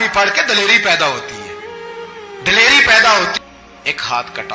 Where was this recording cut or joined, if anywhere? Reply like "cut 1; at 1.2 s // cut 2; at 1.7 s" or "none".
cut 1; at 3.4 s

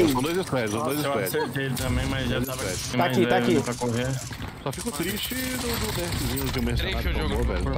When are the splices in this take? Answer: cut 1; at 2.9 s

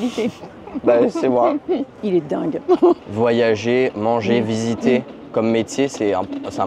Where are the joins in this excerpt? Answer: cut 1; at 1.9 s // cut 2; at 3.1 s

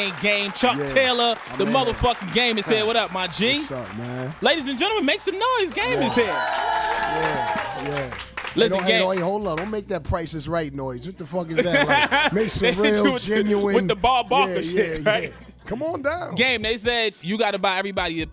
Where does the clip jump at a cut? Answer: cut 1; at 8.4 s

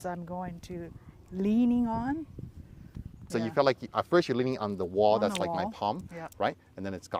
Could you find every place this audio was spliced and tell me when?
cut 1; at 3.2 s

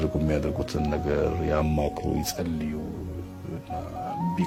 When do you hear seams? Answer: none

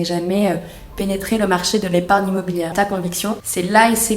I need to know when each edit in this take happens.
cut 1; at 2.7 s

